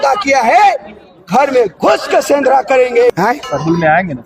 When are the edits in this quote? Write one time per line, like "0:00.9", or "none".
0:03.3